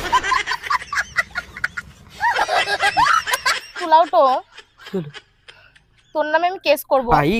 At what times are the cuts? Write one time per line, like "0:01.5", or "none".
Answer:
none